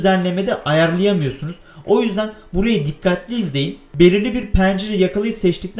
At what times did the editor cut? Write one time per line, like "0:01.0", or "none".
0:03.8